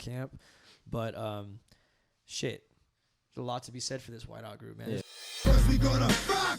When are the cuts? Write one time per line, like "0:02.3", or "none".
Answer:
0:05.0